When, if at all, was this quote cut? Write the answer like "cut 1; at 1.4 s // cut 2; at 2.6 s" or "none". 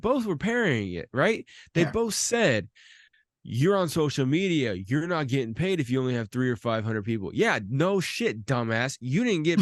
none